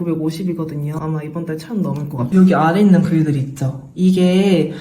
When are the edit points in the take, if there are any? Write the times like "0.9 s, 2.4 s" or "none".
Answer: 1.0 s, 2.2 s